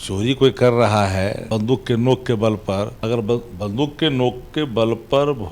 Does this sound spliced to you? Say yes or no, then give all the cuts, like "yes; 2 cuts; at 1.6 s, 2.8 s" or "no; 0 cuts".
yes; 2 cuts; at 1.4 s, 3.0 s